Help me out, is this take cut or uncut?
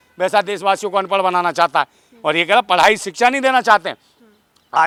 uncut